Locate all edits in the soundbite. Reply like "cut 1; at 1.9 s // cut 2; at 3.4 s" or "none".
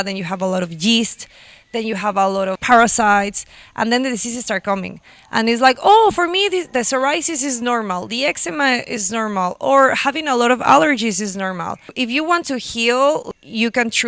cut 1; at 2.6 s // cut 2; at 11.9 s // cut 3; at 13.2 s